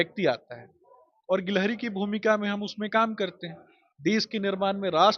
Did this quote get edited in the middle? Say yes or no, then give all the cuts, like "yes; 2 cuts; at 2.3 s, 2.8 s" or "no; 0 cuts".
no; 0 cuts